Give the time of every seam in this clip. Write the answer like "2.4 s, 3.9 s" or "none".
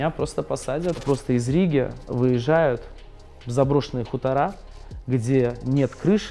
1.0 s

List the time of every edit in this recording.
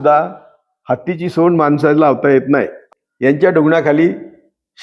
2.8 s

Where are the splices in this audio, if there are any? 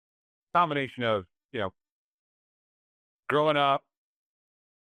none

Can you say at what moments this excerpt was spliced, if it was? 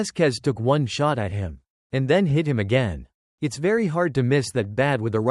none

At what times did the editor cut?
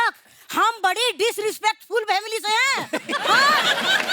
none

